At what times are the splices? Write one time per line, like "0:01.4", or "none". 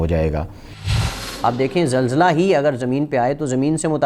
0:01.0